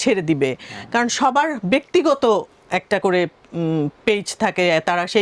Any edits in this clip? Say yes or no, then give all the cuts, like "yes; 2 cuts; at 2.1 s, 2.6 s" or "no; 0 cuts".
no; 0 cuts